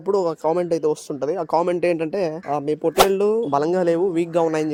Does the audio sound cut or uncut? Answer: uncut